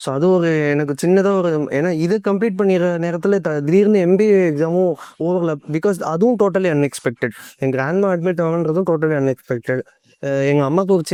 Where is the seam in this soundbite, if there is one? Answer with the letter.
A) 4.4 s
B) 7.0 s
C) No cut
C